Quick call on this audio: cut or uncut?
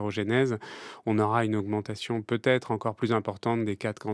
uncut